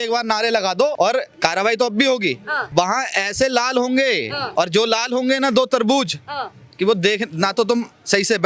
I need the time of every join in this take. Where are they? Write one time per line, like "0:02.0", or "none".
0:00.9
0:02.5
0:04.4